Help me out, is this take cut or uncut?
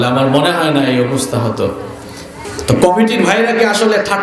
cut